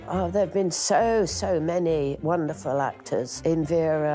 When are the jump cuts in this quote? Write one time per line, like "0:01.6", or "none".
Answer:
0:02.2
0:03.3